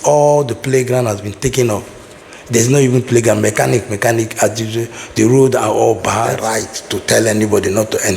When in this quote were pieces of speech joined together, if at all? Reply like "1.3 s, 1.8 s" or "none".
6.4 s